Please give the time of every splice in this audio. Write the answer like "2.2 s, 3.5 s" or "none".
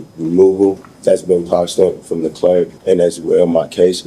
0.9 s, 2.8 s